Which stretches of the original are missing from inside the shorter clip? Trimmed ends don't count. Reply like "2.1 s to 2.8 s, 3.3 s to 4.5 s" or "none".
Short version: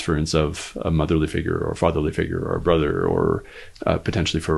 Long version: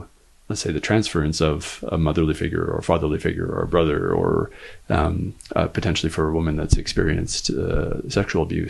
4.7 s to 5.3 s